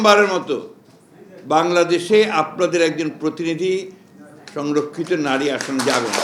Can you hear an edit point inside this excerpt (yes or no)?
no